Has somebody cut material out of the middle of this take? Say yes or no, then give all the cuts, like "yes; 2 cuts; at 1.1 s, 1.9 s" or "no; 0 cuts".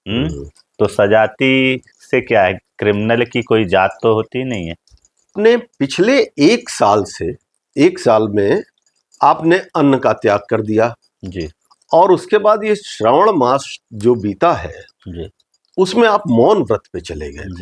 yes; 1 cut; at 5.3 s